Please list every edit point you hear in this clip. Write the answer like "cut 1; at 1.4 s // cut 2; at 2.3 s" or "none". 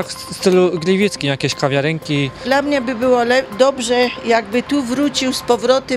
cut 1; at 2.4 s